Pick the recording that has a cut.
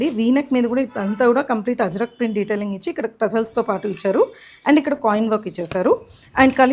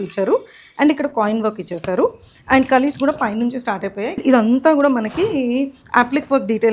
second; 1 cut; at 4.2 s

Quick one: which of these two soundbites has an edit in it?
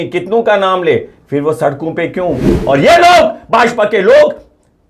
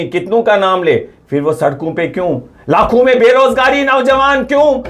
first; 1 cut; at 2.5 s

